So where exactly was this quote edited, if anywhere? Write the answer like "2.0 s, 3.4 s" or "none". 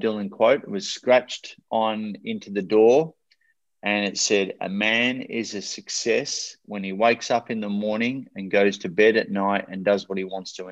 none